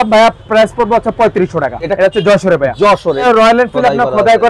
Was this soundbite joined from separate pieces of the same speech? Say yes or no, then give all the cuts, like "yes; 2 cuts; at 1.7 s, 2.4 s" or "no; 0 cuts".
yes; 2 cuts; at 1.8 s, 3.2 s